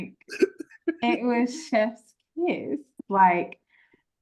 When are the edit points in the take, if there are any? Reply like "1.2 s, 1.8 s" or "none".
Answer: none